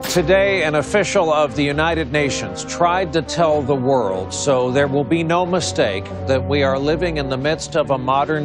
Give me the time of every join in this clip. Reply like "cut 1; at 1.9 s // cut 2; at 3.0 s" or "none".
none